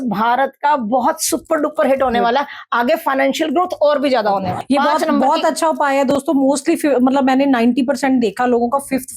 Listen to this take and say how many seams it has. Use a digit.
1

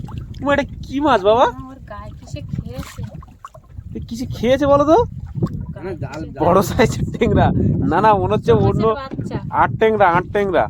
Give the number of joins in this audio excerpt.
0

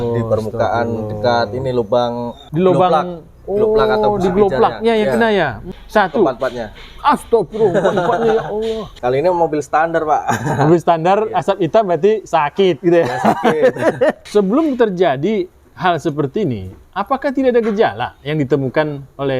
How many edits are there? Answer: 4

